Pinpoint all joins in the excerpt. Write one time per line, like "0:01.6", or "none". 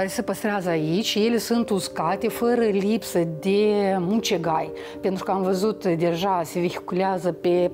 none

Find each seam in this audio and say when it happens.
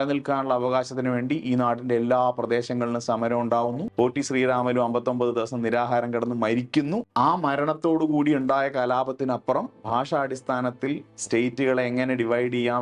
0:03.9
0:07.1

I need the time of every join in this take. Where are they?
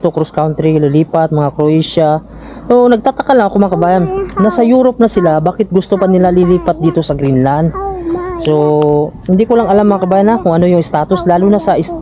none

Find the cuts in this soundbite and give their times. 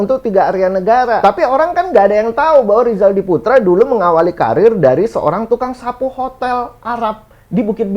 0:01.2

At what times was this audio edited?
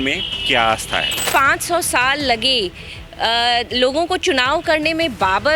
0:01.3

